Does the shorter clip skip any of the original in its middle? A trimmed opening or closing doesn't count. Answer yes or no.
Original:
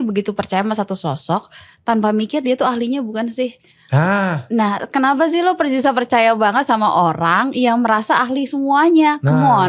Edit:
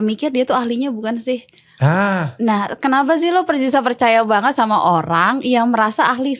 no